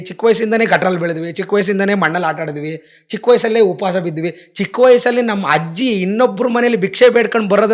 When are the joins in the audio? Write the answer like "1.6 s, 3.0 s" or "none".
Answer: none